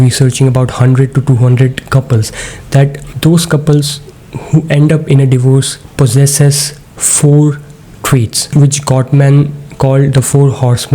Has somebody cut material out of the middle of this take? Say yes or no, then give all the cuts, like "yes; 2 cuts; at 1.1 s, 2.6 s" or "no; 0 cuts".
yes; 2 cuts; at 3.0 s, 5.8 s